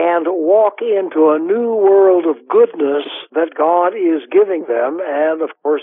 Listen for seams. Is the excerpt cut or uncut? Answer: cut